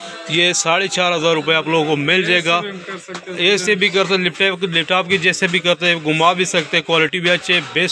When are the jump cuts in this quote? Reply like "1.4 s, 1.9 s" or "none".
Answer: none